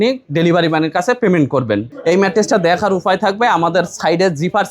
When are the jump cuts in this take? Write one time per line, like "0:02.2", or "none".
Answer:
0:01.9